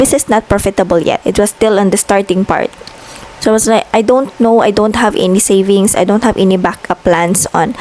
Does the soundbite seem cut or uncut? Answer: uncut